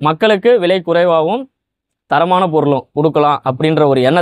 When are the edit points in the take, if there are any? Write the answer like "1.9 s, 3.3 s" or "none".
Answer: none